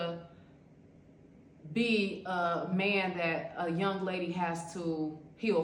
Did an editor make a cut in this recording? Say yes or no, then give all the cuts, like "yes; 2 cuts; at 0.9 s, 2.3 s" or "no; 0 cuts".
no; 0 cuts